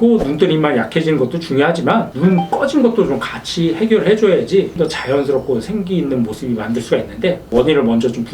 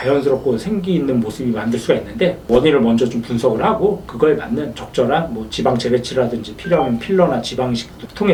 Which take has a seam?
first; 1 cut; at 2.1 s

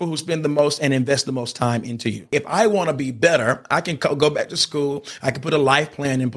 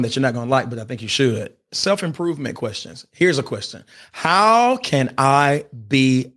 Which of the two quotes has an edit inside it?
first; 1 cut; at 2.3 s

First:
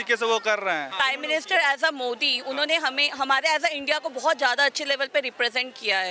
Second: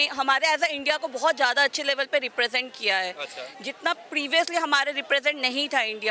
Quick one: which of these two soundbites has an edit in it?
first; 1 cut; at 0.9 s

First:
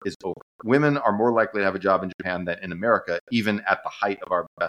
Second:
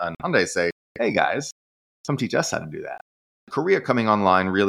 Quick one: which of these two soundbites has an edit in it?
second; 1 cut; at 3.4 s

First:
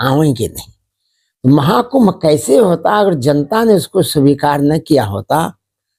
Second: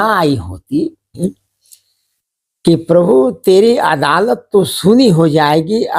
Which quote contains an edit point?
second; 1 cut; at 1.2 s

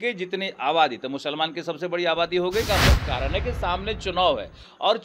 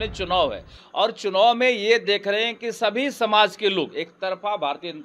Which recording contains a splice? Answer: first; 1 cut; at 2.7 s

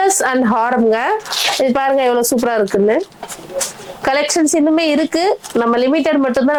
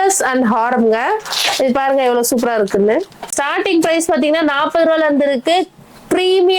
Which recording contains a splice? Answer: second; 1 cut; at 3.3 s

